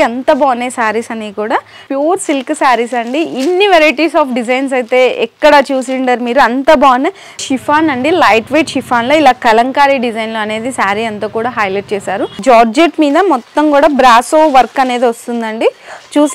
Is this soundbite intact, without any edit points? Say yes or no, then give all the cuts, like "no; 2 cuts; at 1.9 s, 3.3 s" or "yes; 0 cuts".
no; 3 cuts; at 1.8 s, 7.4 s, 12.3 s